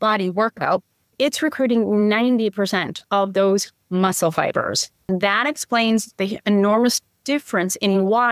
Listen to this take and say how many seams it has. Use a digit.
2